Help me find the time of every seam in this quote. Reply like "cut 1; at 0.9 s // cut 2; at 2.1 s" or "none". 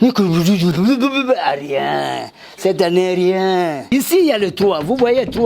cut 1; at 3.9 s